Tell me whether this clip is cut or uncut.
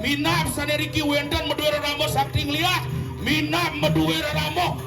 uncut